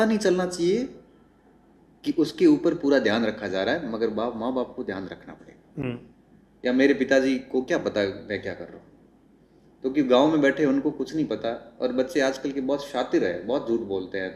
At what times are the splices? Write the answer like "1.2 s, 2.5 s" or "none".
5.8 s